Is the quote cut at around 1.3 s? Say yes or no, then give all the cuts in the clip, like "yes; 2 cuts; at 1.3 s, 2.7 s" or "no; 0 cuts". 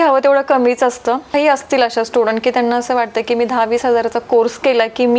yes; 1 cut; at 1.3 s